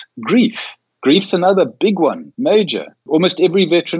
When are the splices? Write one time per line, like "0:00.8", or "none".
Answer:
0:02.3
0:03.0